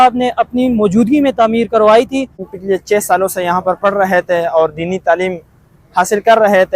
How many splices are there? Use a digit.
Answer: 1